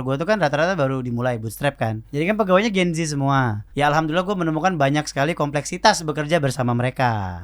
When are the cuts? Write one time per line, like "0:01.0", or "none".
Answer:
0:02.0
0:03.6